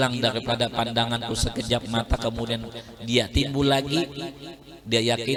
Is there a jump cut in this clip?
no; 0 cuts

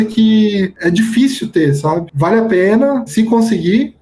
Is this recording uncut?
no; 2 cuts; at 2.1 s, 3.1 s

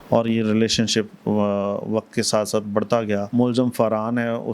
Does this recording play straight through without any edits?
no; 1 cut; at 3.3 s

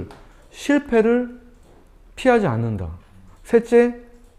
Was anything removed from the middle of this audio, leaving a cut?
no; 0 cuts

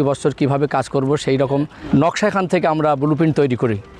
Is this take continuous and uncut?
no; 1 cut; at 1.8 s

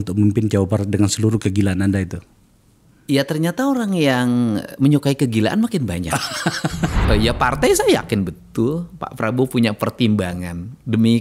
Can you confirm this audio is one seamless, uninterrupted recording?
no; 1 cut; at 7.0 s

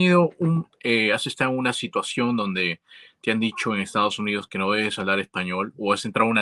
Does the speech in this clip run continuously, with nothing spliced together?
yes; 0 cuts

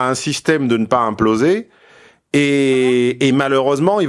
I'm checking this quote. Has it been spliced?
no; 0 cuts

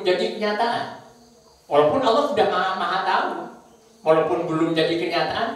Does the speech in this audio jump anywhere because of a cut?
no; 0 cuts

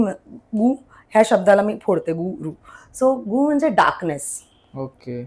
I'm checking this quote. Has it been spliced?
no; 0 cuts

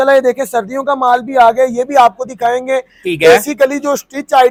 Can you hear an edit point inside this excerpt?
no; 0 cuts

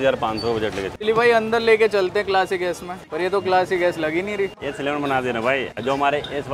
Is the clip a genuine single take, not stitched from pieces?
no; 3 cuts; at 0.9 s, 3.0 s, 4.6 s

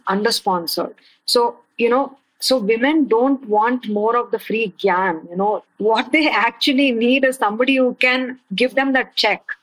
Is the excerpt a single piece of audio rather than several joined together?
no; 2 cuts; at 1.0 s, 5.7 s

